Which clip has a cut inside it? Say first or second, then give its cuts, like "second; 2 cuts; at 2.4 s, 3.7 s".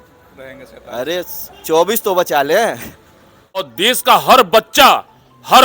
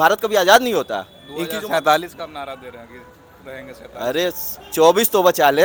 first; 1 cut; at 3.7 s